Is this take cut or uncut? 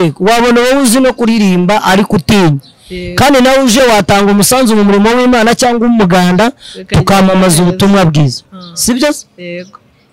uncut